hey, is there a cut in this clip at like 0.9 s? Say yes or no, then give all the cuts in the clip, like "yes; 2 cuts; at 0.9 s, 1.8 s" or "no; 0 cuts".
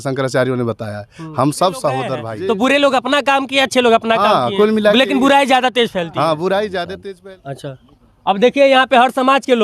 no; 2 cuts; at 2.3 s, 6.9 s